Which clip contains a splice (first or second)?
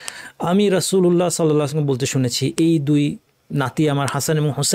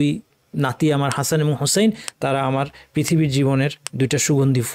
second